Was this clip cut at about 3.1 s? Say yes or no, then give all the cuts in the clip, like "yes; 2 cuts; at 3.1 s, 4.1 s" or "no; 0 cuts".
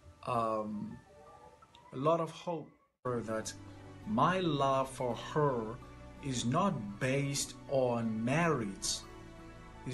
yes; 1 cut; at 3.1 s